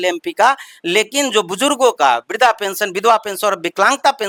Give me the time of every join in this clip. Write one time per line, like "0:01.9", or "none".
none

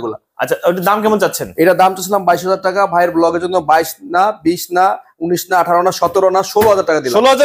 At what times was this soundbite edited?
none

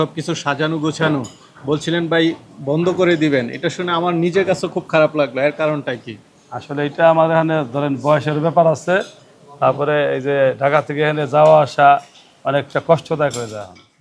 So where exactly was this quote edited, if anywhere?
none

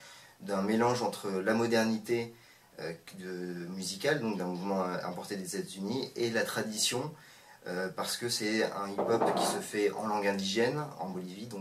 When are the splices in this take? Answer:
none

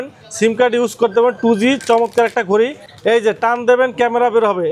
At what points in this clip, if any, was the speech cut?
0:02.8

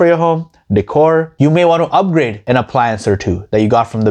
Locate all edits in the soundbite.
none

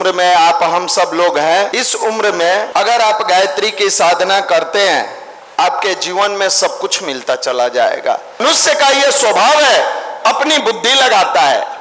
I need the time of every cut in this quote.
0:01.7
0:02.7
0:08.4

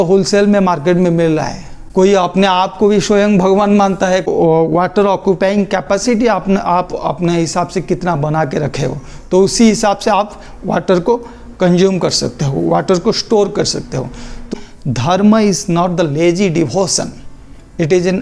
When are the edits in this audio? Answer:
0:01.7
0:04.3
0:14.5

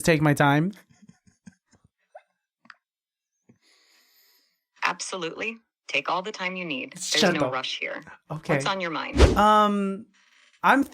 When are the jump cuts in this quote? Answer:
0:09.2

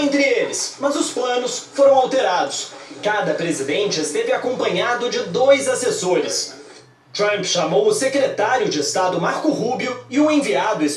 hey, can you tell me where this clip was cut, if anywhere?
0:03.7

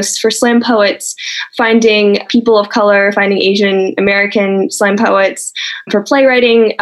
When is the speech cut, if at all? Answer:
0:01.4
0:02.3
0:05.9

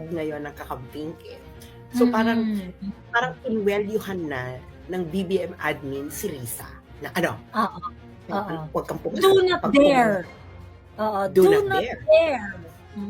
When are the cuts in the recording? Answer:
none

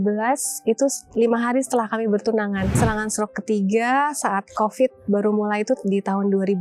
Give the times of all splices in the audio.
0:02.8

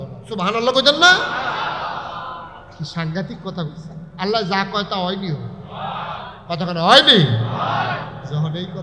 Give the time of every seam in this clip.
0:02.6

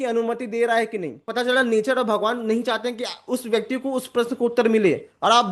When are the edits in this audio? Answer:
0:01.2

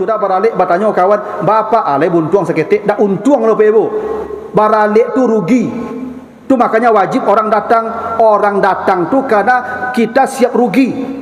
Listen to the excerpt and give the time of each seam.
none

